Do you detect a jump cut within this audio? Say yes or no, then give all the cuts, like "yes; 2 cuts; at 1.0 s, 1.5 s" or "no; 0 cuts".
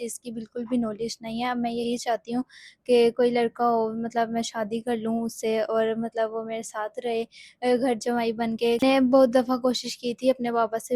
yes; 1 cut; at 8.8 s